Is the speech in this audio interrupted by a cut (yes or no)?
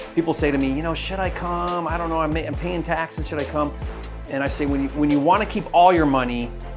no